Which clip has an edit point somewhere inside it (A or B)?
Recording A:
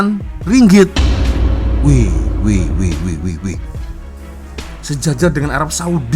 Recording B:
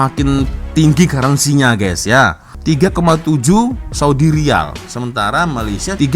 B